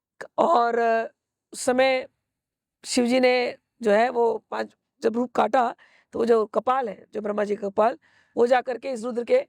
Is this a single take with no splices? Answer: yes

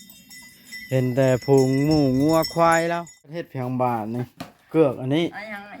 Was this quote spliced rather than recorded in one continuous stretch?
yes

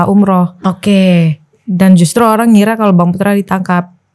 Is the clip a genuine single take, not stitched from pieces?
yes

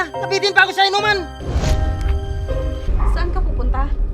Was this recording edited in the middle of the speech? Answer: yes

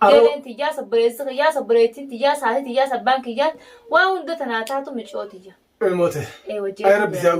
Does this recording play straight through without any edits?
yes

